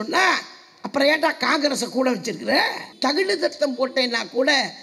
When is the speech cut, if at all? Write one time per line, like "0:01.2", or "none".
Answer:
0:02.9